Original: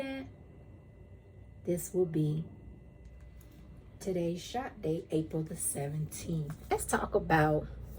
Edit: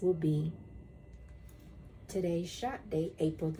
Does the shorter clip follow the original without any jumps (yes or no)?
yes